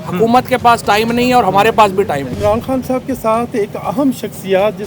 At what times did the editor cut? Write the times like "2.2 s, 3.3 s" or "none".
2.3 s